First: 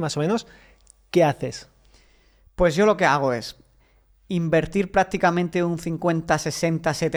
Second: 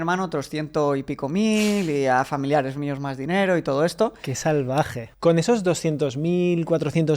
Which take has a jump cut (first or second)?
second